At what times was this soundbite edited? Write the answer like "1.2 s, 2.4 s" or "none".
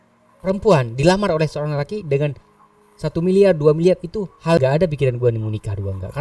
4.6 s